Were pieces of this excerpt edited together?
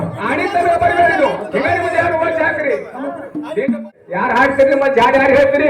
yes; 1 cut; at 4.0 s

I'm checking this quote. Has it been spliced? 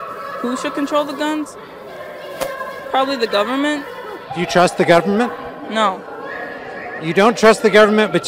no; 0 cuts

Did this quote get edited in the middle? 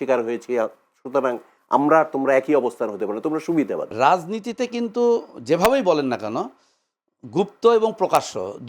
yes; 1 cut; at 3.8 s

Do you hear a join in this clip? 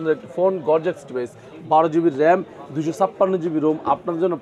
no; 0 cuts

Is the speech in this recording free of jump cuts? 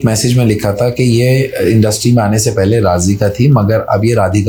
yes; 0 cuts

